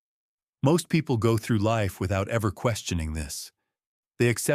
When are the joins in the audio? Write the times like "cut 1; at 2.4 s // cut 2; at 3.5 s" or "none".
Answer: none

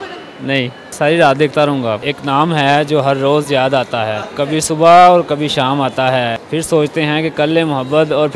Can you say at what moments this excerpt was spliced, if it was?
cut 1; at 0.9 s // cut 2; at 2.1 s // cut 3; at 4.3 s // cut 4; at 6.4 s

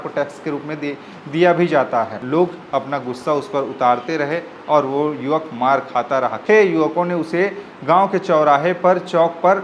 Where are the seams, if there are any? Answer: cut 1; at 2.2 s // cut 2; at 6.4 s

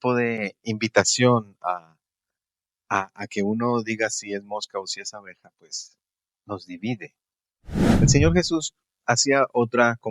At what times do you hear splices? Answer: cut 1; at 7.8 s

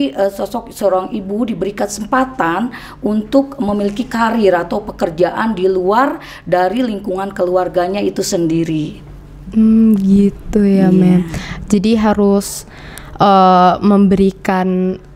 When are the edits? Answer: none

